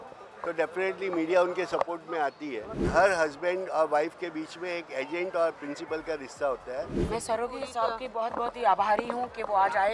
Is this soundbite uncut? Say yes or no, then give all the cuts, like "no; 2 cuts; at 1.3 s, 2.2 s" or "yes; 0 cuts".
no; 2 cuts; at 2.9 s, 7.0 s